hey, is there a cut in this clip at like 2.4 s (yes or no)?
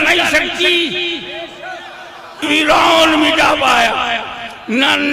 yes